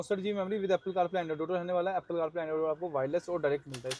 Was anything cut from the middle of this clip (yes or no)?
no